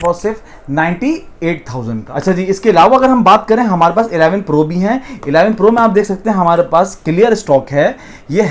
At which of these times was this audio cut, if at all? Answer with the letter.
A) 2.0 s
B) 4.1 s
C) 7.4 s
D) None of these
A